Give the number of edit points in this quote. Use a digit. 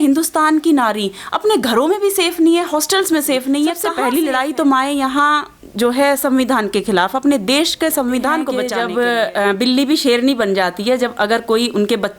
2